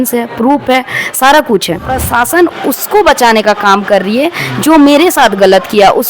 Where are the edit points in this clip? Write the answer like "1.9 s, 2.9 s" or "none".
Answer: 2.0 s